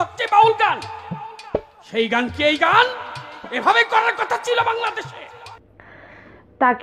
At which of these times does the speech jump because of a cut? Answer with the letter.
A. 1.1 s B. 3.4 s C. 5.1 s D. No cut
D